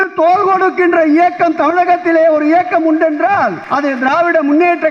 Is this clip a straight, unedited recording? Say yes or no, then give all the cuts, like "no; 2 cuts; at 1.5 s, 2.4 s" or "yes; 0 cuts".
no; 1 cut; at 3.6 s